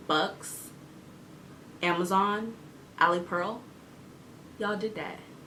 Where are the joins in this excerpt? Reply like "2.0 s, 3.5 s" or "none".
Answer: none